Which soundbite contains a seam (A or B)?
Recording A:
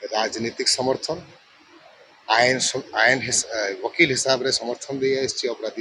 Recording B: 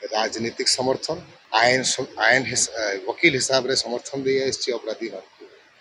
B